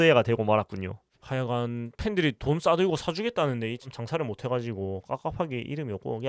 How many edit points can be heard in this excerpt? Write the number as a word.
one